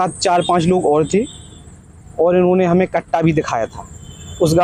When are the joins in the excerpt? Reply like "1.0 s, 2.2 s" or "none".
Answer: none